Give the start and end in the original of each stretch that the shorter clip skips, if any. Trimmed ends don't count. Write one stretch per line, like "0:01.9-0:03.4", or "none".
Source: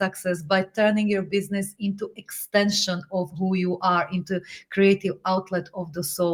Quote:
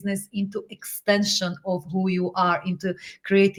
none